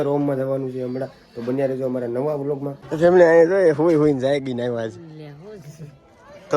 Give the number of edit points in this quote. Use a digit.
1